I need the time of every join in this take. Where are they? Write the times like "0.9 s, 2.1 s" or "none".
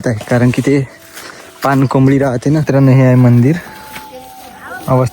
2.7 s